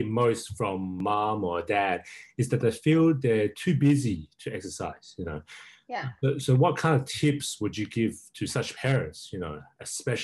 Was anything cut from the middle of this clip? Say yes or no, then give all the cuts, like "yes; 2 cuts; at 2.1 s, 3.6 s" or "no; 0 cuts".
yes; 1 cut; at 1.0 s